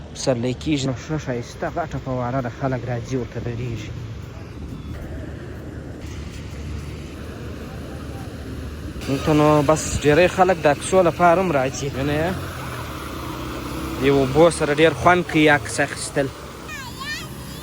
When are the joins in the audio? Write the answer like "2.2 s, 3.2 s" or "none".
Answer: 0.9 s, 5.0 s, 6.0 s, 7.1 s, 11.9 s, 16.7 s

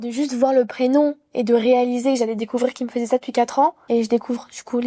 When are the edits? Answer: 3.8 s

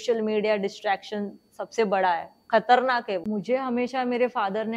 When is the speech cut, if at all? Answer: 3.2 s

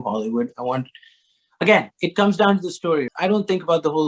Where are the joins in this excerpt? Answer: 3.1 s

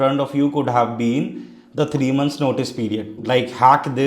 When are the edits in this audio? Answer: 3.2 s

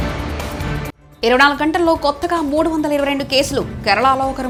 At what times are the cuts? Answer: none

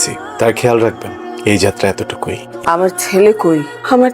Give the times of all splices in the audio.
2.5 s

